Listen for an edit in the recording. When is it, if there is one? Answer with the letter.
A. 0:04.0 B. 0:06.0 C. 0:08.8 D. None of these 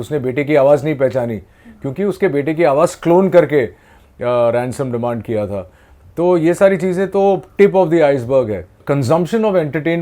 C